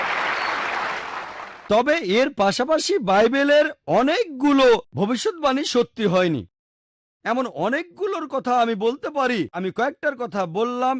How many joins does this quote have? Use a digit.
2